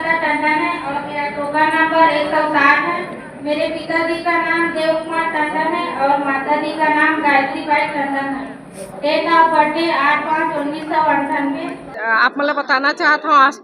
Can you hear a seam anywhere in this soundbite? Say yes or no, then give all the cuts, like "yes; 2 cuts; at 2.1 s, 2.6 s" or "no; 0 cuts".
yes; 1 cut; at 11.9 s